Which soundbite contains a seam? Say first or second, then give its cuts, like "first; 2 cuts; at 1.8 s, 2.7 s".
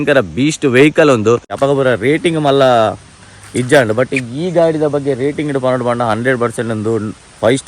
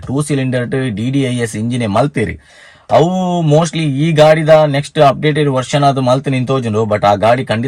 first; 1 cut; at 1.5 s